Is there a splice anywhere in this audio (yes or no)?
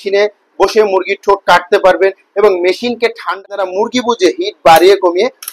yes